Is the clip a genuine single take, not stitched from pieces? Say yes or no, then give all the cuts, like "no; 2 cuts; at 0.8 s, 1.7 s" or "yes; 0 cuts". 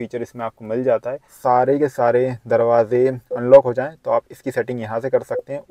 no; 1 cut; at 1.3 s